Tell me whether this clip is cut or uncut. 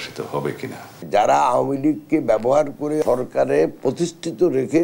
cut